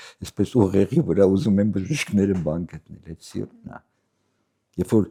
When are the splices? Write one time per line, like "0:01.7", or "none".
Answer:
none